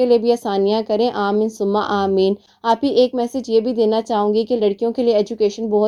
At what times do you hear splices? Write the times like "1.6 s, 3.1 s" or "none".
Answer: none